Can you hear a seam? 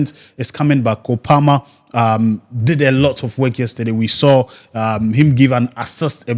no; 0 cuts

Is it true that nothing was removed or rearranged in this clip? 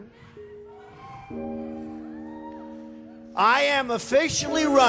yes; 0 cuts

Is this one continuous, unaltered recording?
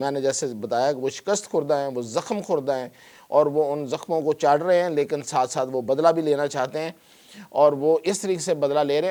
yes; 0 cuts

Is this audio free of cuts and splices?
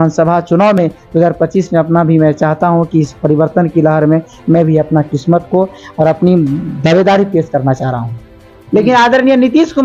no; 1 cut; at 8.6 s

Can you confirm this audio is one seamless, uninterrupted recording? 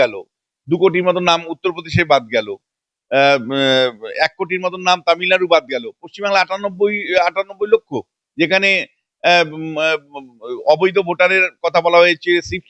yes; 0 cuts

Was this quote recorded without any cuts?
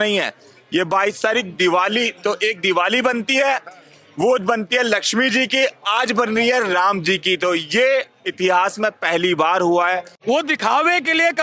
no; 1 cut; at 10.1 s

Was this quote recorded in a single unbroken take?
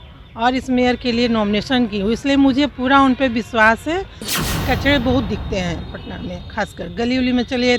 no; 1 cut; at 4.3 s

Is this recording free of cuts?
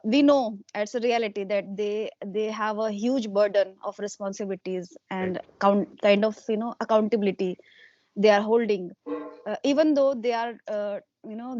yes; 0 cuts

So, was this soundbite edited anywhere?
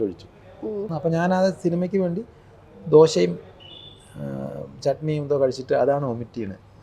yes; 1 cut; at 0.9 s

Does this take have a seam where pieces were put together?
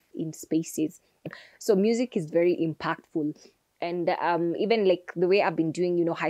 yes; 1 cut; at 1.3 s

